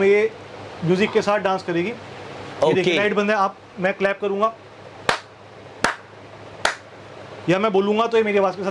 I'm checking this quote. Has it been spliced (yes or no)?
no